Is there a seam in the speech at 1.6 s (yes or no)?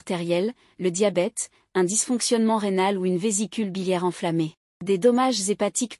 no